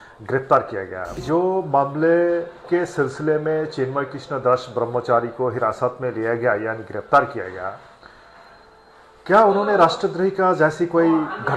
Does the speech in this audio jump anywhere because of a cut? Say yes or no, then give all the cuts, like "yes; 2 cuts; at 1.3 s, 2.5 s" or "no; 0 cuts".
yes; 1 cut; at 1.2 s